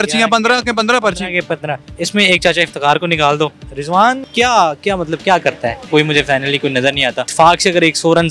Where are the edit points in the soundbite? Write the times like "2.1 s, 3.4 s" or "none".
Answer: 1.9 s, 4.0 s, 5.8 s, 7.3 s